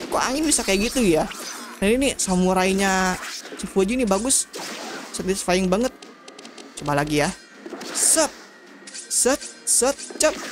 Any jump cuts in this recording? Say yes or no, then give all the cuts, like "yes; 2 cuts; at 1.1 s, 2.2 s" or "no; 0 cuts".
no; 0 cuts